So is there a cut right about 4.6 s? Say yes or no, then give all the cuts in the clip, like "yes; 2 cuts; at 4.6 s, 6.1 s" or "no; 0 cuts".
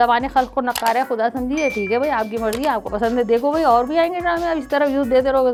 no; 0 cuts